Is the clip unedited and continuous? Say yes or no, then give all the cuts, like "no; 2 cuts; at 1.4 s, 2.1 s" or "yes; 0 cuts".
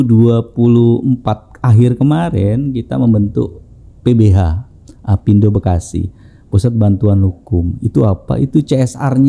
yes; 0 cuts